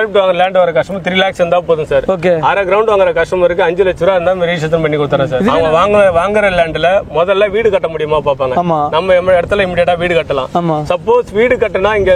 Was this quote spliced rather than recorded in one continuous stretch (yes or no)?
yes